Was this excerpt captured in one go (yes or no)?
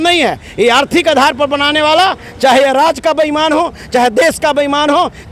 yes